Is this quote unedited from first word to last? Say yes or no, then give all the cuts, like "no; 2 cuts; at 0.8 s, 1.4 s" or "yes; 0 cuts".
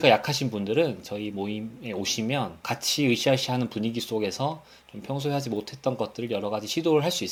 yes; 0 cuts